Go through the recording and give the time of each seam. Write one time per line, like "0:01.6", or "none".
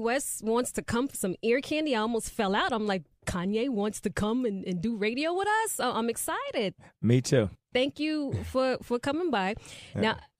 0:05.4